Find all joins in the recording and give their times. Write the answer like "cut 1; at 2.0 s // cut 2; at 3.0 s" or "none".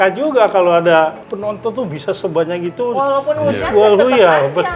cut 1; at 1.3 s